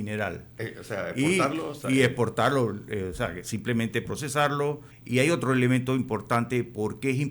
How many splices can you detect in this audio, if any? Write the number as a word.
one